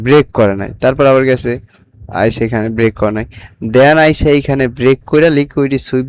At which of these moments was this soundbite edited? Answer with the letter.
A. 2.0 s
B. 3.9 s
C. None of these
C